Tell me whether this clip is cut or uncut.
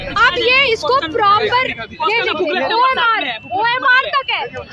uncut